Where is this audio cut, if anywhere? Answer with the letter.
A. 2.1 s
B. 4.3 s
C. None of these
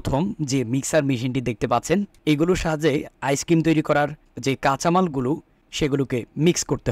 A